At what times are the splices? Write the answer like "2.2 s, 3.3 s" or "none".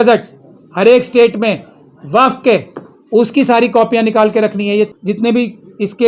4.9 s